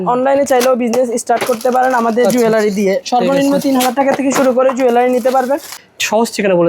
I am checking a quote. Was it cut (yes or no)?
yes